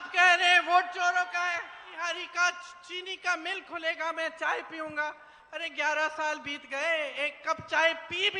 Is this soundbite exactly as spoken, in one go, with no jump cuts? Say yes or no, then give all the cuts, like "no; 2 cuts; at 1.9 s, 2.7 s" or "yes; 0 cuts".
no; 1 cut; at 1.9 s